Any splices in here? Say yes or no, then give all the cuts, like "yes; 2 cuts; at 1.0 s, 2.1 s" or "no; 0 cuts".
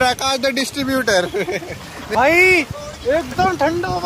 yes; 1 cut; at 1.9 s